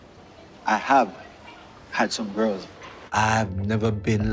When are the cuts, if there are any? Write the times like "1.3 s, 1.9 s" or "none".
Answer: 3.0 s